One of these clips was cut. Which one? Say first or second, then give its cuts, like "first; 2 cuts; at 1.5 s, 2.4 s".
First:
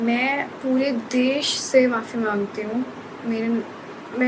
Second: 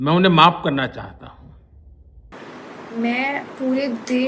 second; 1 cut; at 1.9 s